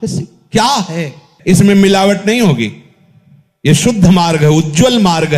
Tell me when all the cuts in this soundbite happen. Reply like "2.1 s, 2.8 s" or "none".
1.3 s